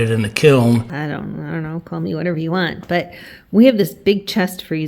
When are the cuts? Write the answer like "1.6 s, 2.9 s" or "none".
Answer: 0.9 s